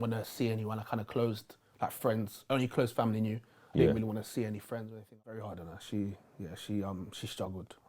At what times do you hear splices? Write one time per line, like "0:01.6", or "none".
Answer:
0:05.4